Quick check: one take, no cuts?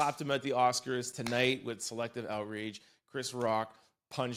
yes; 0 cuts

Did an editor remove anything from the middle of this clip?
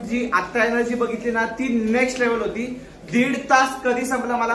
no; 0 cuts

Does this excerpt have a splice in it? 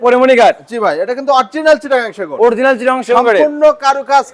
no; 0 cuts

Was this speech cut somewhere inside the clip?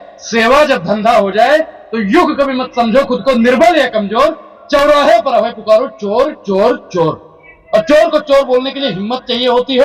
no; 0 cuts

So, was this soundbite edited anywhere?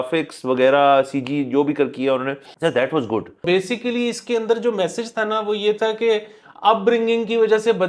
yes; 2 cuts; at 2.5 s, 3.4 s

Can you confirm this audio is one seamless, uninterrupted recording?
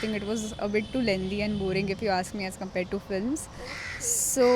yes; 0 cuts

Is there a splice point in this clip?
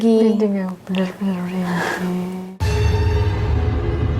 yes; 1 cut; at 2.4 s

